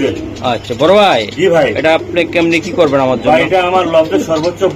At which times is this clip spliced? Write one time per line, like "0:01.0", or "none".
none